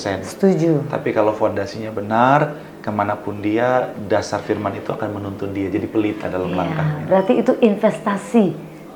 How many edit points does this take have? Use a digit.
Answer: 0